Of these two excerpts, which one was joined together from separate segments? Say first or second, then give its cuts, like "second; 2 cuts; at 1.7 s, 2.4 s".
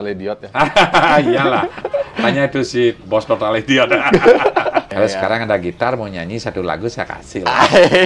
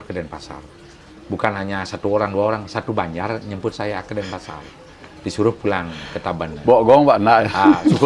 first; 1 cut; at 4.9 s